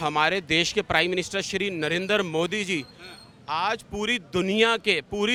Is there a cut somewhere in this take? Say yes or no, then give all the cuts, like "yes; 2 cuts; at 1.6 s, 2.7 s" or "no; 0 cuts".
no; 0 cuts